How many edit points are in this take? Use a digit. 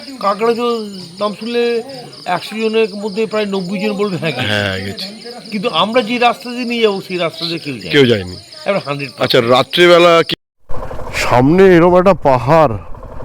1